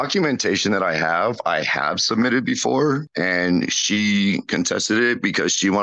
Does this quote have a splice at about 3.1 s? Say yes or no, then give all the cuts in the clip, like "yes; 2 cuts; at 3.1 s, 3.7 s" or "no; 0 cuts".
yes; 1 cut; at 3.1 s